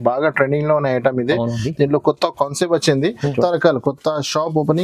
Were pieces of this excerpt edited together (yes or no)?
yes